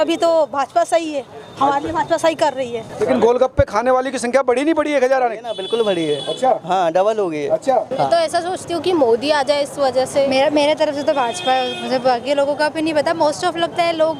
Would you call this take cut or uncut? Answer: cut